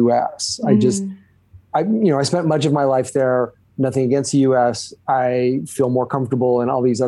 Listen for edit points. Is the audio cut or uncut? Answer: uncut